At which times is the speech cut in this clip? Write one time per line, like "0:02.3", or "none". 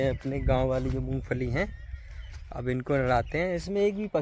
none